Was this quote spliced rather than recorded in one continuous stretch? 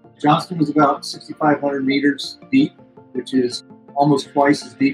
no; 0 cuts

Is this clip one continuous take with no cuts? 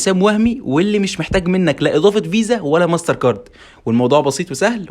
yes; 0 cuts

